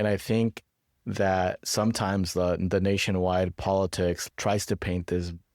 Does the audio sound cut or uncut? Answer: cut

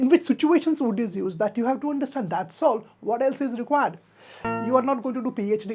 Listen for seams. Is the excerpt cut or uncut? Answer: uncut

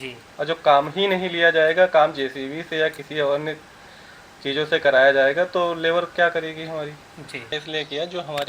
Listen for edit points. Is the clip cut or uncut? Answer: cut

